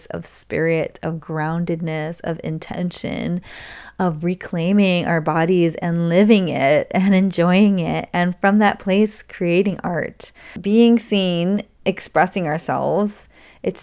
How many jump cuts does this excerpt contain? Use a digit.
1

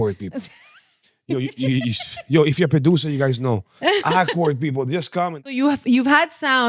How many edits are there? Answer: 1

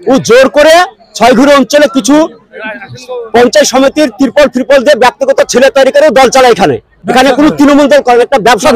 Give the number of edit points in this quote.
0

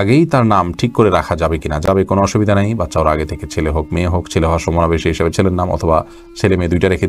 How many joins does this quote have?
0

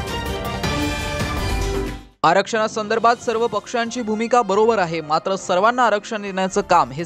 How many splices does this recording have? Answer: 1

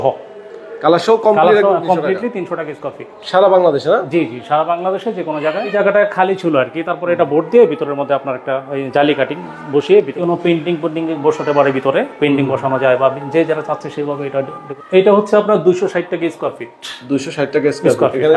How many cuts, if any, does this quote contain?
3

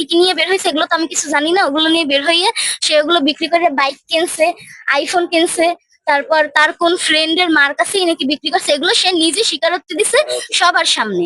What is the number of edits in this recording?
0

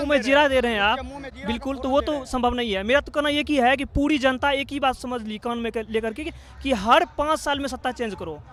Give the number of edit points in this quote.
0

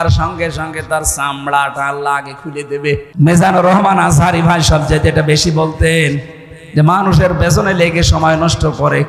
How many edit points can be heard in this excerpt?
1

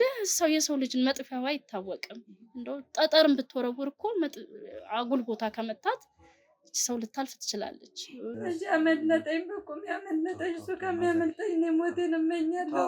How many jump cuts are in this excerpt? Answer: 1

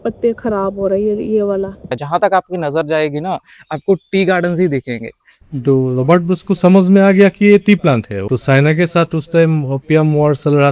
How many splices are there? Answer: 3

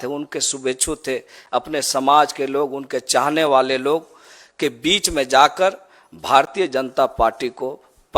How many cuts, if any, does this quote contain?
0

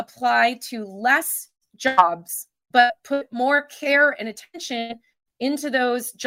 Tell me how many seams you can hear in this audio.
0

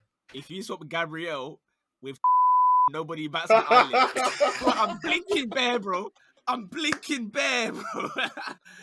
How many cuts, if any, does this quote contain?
0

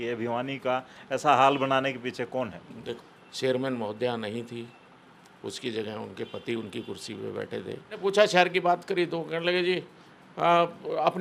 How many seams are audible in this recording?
2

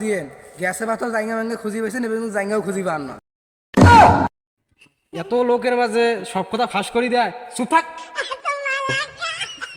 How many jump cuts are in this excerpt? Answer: 0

